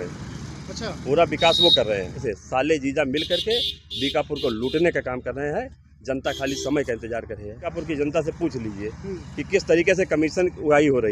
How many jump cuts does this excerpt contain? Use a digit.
2